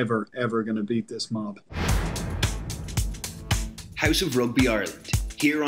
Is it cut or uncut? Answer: cut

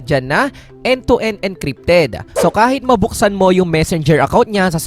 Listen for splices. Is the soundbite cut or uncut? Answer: cut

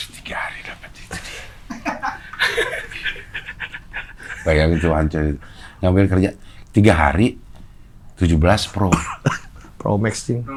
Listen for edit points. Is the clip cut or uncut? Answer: uncut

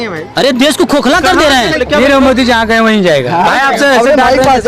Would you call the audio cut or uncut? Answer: cut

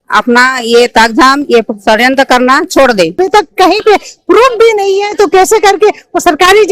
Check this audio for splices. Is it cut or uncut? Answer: cut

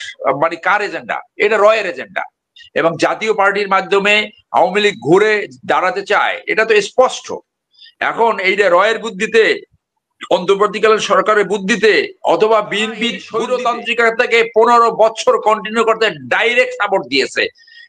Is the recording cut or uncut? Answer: cut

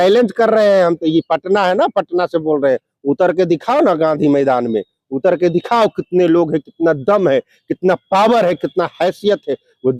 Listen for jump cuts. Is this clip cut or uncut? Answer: uncut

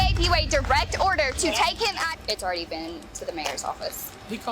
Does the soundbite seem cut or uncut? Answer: cut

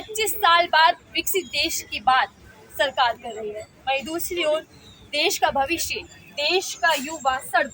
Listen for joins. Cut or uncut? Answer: uncut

